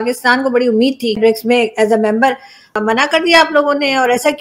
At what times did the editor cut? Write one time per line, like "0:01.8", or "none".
0:01.2
0:02.7